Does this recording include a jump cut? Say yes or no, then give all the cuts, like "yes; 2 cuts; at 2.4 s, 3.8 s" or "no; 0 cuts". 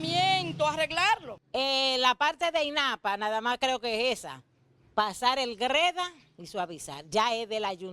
yes; 1 cut; at 1.4 s